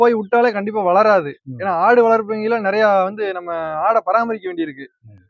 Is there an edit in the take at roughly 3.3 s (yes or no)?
no